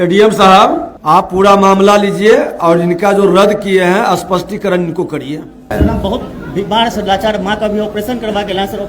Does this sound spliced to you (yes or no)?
yes